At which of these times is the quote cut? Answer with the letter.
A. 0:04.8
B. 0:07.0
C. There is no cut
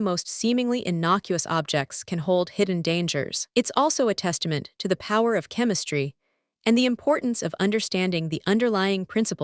C